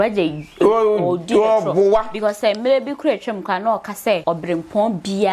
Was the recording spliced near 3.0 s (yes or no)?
no